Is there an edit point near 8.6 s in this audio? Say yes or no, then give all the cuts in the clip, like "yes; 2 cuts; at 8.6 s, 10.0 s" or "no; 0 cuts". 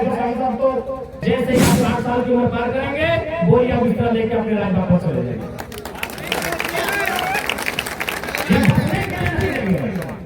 no; 1 cut; at 1.1 s